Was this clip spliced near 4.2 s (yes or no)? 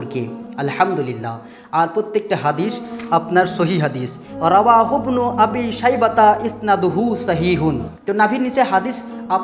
yes